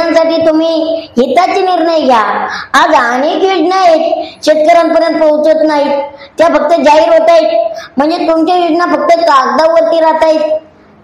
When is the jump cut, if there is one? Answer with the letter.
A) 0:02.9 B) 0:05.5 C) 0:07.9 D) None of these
D